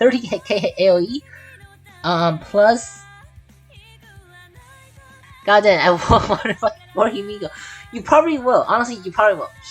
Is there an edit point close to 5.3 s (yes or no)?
yes